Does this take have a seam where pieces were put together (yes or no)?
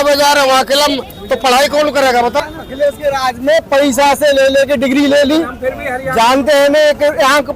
yes